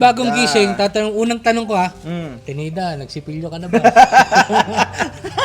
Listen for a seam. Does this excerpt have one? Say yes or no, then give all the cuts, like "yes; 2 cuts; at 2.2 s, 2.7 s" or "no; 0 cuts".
no; 0 cuts